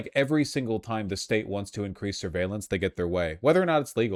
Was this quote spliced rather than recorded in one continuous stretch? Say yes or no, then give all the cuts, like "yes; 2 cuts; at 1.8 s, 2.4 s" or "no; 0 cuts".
no; 0 cuts